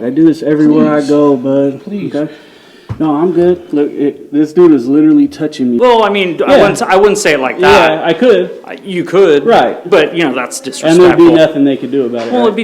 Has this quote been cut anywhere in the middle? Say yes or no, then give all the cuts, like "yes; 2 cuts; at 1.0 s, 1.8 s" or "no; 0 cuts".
yes; 1 cut; at 5.8 s